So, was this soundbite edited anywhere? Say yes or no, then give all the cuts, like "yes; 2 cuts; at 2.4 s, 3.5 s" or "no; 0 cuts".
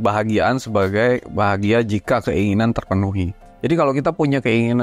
yes; 1 cut; at 3.3 s